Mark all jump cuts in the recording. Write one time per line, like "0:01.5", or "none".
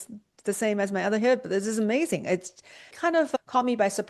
none